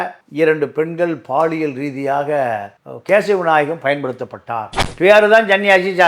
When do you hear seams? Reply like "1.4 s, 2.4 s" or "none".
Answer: 4.8 s